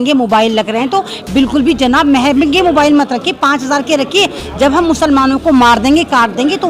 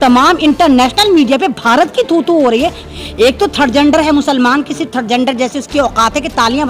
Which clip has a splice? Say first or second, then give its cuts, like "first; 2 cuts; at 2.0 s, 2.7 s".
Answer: second; 1 cut; at 2.8 s